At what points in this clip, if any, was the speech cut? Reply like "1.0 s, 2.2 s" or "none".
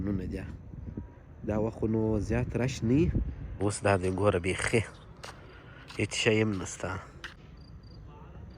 3.6 s, 7.4 s